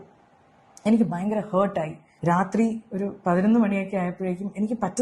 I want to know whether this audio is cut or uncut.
cut